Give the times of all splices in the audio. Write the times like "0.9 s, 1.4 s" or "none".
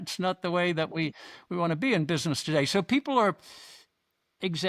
none